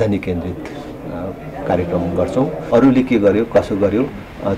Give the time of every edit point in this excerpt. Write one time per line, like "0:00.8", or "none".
0:02.6